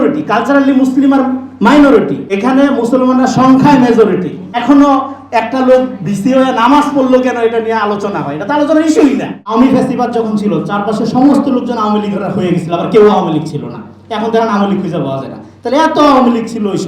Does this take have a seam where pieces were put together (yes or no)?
yes